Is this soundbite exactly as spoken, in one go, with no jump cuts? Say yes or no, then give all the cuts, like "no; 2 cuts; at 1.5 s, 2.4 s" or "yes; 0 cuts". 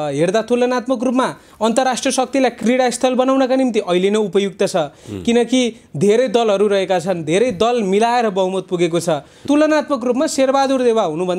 no; 2 cuts; at 2.6 s, 9.4 s